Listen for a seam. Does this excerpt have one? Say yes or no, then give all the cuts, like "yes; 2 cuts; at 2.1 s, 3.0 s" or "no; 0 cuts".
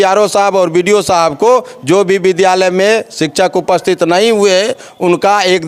no; 0 cuts